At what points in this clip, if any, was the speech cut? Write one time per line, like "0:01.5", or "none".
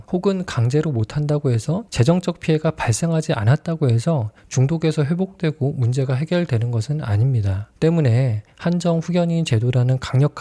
none